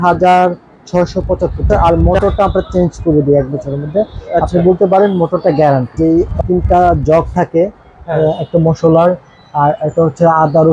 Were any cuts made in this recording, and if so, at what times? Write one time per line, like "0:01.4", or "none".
0:01.6
0:05.9